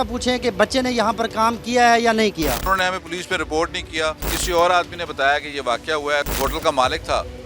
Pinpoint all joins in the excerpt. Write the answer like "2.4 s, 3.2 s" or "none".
2.6 s, 4.3 s, 6.3 s